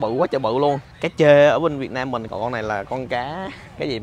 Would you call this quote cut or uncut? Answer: cut